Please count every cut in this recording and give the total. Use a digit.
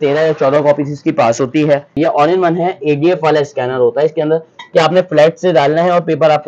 1